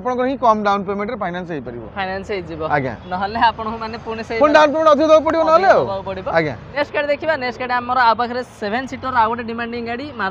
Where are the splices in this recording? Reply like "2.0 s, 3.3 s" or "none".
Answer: 6.7 s